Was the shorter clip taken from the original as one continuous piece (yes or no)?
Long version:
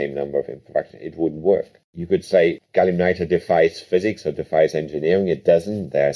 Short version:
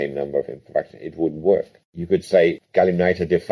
yes